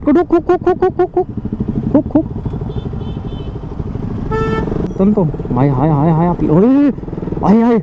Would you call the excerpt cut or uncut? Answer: cut